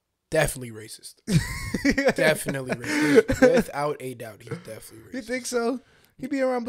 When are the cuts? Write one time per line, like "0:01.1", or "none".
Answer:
none